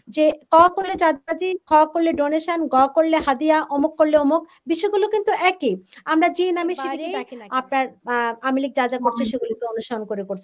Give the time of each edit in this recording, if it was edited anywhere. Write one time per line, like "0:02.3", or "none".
0:07.0